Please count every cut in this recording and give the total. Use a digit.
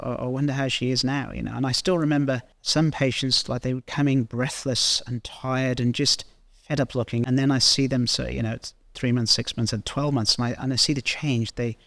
2